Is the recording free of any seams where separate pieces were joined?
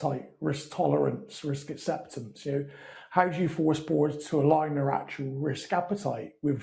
yes; 0 cuts

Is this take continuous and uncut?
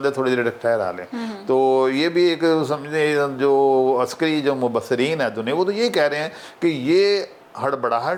yes; 0 cuts

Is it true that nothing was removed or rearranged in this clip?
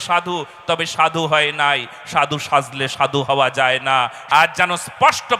no; 1 cut; at 4.2 s

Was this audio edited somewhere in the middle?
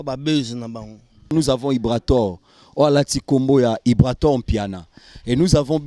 yes; 1 cut; at 1.3 s

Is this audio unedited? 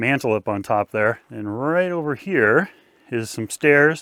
yes; 0 cuts

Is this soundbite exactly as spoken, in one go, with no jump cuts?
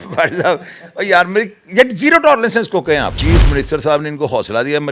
no; 1 cut; at 3.2 s

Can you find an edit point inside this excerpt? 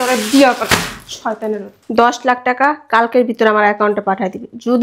yes; 1 cut; at 1.7 s

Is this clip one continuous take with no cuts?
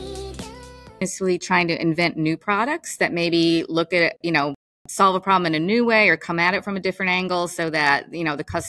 no; 1 cut; at 1.0 s

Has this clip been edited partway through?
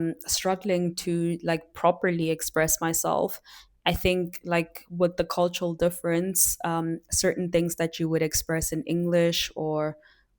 no; 0 cuts

